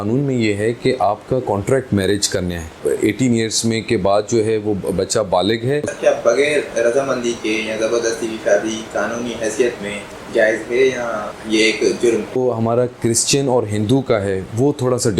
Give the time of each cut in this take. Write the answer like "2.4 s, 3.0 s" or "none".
2.8 s, 5.9 s, 10.1 s, 11.3 s, 12.4 s